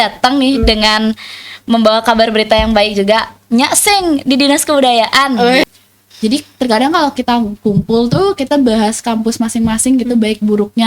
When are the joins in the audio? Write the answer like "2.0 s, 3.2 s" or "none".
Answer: 5.7 s